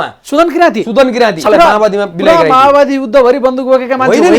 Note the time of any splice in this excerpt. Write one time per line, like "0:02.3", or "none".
0:01.4